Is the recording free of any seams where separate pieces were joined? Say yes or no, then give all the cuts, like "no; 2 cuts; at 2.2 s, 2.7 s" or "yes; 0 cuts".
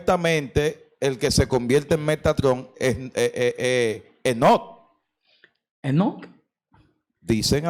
yes; 0 cuts